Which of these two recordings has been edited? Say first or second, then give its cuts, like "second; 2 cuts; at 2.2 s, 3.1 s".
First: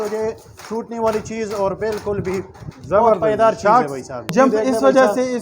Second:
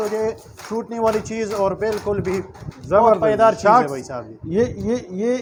first; 1 cut; at 4.3 s